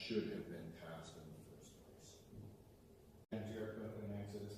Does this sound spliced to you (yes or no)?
yes